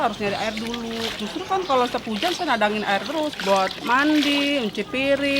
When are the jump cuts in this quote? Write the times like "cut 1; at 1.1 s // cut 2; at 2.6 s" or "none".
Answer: cut 1; at 3.4 s